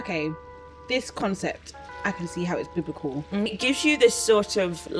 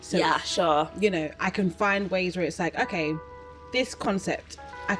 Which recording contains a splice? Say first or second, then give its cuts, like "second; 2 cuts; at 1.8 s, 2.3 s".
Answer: first; 1 cut; at 3.5 s